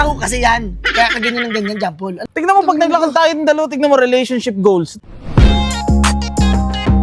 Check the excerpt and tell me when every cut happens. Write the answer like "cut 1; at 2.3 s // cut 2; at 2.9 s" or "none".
cut 1; at 2.1 s // cut 2; at 5.0 s